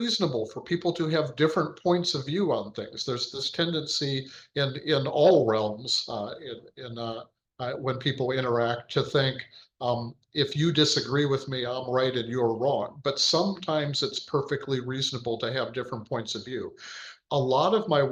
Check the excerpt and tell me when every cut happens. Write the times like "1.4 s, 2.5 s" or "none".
none